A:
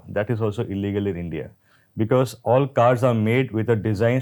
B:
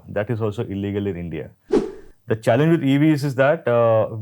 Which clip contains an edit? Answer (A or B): B